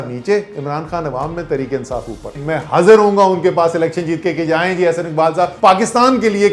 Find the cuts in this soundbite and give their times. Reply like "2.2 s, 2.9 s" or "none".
2.4 s, 5.5 s